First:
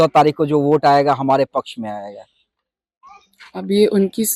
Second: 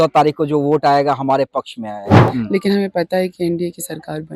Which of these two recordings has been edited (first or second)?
second